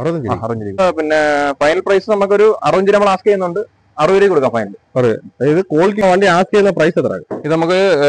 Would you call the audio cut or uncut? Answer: cut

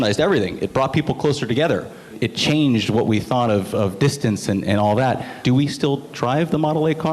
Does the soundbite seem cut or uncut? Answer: cut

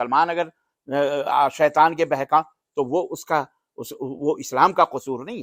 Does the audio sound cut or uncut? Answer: uncut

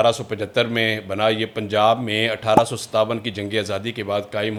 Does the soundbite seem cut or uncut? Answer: uncut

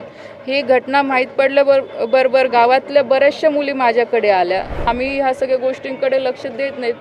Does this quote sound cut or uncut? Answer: cut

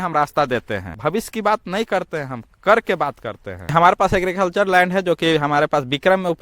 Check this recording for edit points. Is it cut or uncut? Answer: cut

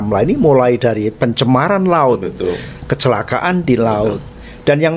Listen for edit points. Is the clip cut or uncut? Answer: uncut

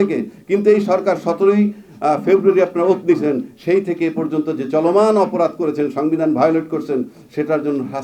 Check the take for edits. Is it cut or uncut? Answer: uncut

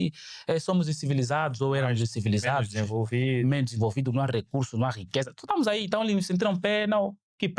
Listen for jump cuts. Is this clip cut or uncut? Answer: uncut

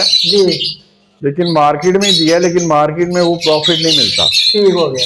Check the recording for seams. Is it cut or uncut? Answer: uncut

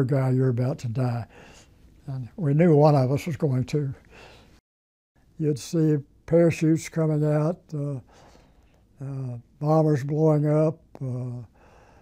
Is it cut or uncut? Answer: cut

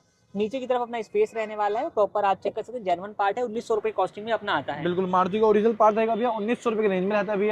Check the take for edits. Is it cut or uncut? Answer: uncut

